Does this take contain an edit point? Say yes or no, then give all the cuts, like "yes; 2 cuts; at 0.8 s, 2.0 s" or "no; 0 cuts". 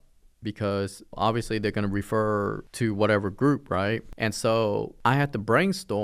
yes; 4 cuts; at 1.1 s, 2.6 s, 4.1 s, 4.9 s